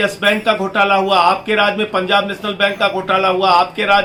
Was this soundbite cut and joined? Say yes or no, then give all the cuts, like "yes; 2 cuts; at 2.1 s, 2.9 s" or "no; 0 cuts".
no; 0 cuts